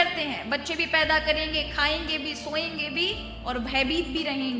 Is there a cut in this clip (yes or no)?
no